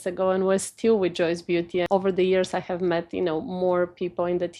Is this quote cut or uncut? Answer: cut